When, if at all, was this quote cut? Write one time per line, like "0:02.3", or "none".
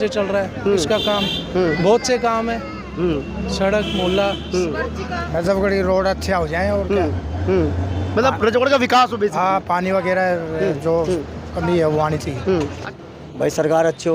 0:05.2
0:12.8